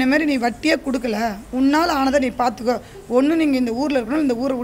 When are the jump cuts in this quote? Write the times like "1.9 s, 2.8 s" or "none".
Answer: none